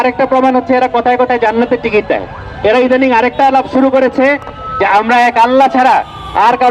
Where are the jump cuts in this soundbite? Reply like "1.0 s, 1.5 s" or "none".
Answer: none